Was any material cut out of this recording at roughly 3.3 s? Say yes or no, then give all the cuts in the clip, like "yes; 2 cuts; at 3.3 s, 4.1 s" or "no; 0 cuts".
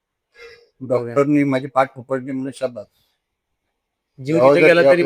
no; 0 cuts